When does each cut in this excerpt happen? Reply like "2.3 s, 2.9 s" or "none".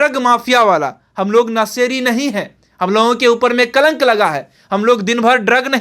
none